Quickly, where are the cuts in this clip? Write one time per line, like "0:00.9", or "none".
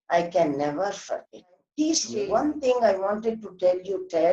0:02.1